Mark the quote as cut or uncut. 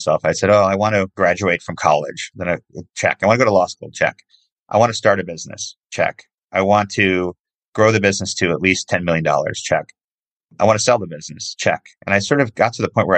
cut